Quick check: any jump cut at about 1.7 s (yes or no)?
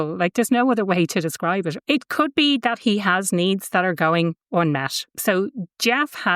yes